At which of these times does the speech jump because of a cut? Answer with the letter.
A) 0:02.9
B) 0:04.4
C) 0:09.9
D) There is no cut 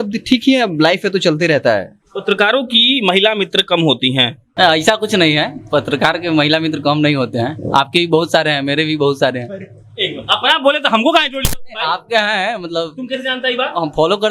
B